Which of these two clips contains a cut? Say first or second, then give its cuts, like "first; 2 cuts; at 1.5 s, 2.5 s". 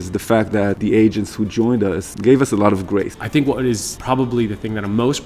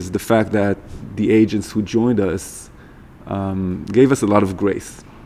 first; 4 cuts; at 0.8 s, 2.1 s, 3.2 s, 3.9 s